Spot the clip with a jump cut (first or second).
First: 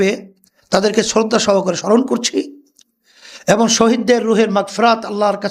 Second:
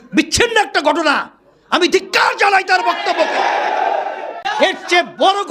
second